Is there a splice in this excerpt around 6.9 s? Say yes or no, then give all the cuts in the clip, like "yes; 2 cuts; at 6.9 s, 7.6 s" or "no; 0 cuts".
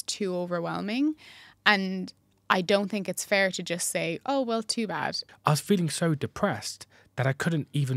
no; 1 cut; at 5.2 s